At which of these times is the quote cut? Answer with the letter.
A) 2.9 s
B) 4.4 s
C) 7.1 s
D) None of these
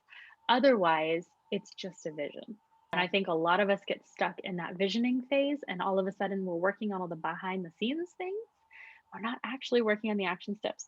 A